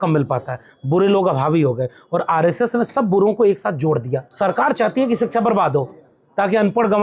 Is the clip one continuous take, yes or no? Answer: no